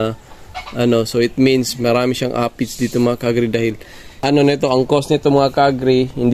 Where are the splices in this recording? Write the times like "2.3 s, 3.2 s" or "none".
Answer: 4.2 s